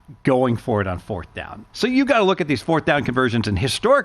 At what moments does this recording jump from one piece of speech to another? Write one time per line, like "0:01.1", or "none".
0:01.6